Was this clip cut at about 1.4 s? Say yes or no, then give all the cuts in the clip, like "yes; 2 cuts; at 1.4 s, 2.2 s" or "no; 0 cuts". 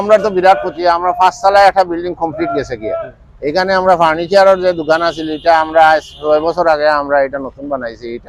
no; 0 cuts